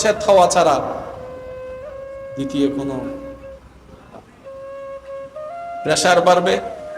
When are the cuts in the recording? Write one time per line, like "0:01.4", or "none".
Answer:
0:01.1
0:02.4